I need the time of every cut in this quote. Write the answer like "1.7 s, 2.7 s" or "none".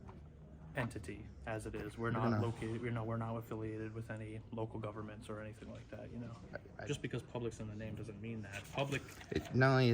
6.7 s